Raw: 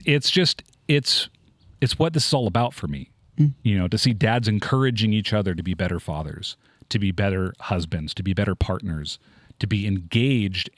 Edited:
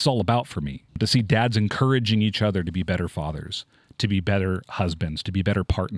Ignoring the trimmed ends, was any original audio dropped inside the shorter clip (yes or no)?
yes